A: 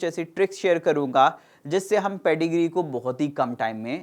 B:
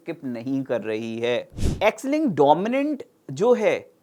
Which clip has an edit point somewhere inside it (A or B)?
B